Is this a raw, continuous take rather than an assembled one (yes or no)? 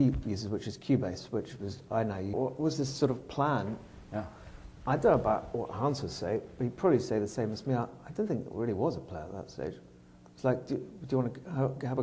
yes